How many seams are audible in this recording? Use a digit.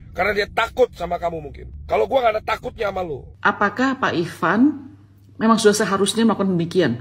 1